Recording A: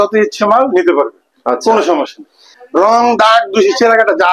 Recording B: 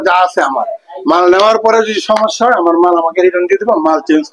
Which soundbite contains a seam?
A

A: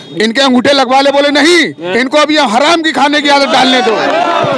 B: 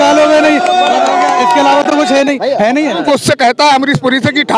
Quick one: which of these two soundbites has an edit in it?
B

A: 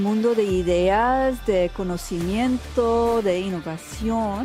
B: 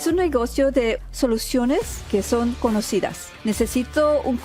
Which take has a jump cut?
B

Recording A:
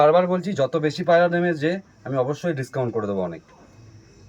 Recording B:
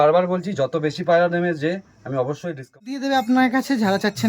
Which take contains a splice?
B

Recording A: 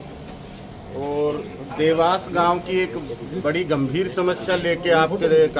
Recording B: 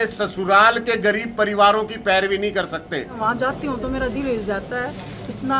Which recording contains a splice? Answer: B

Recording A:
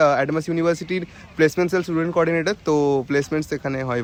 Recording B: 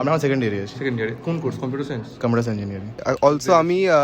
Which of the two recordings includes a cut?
B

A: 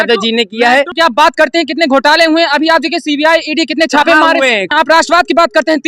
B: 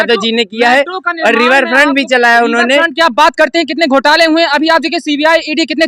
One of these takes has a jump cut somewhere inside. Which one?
A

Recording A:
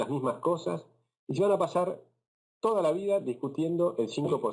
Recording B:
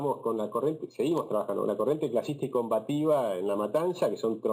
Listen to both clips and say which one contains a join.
A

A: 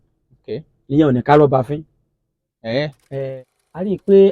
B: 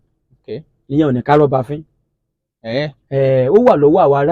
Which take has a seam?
A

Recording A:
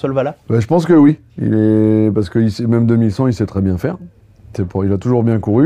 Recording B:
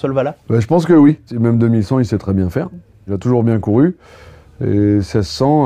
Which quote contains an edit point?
B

